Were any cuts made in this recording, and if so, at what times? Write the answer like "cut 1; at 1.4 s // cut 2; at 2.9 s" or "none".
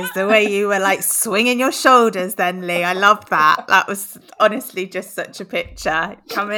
none